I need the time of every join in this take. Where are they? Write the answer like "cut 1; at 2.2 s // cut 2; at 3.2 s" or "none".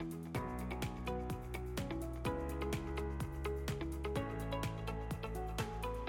none